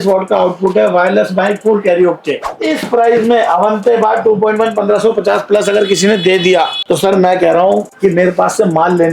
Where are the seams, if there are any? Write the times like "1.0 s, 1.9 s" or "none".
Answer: 2.4 s, 6.8 s